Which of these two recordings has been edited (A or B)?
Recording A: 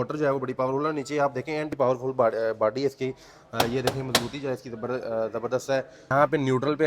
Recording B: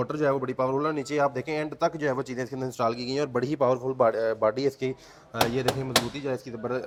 A